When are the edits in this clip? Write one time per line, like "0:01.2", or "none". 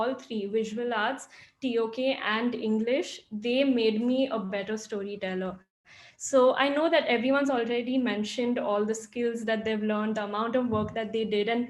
none